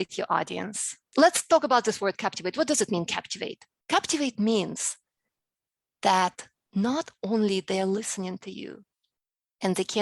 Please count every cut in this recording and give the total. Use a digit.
1